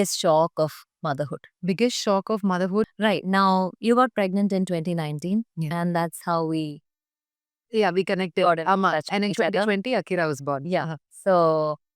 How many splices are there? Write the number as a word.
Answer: one